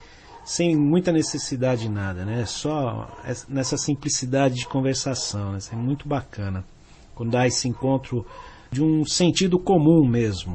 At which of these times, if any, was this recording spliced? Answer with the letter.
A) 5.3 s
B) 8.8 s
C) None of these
A